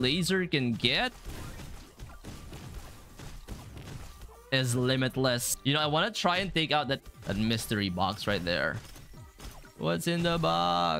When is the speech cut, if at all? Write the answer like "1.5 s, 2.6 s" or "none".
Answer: 5.5 s, 7.1 s